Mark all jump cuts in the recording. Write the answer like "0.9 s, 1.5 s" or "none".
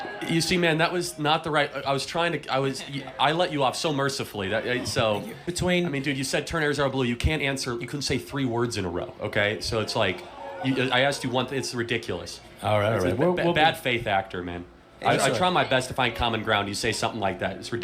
5.4 s